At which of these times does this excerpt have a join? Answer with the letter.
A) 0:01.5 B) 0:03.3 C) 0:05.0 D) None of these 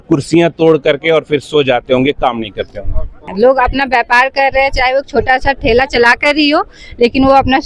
B